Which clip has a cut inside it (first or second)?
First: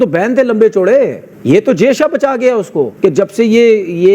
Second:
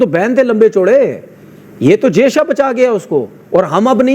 first